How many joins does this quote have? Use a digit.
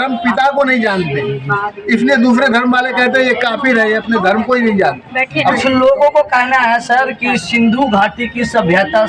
1